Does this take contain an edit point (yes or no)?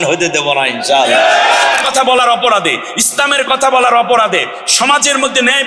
yes